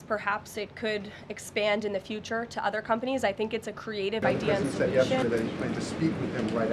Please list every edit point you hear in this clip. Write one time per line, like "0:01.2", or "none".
0:04.2